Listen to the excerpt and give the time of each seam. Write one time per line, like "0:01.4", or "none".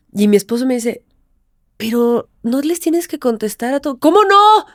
none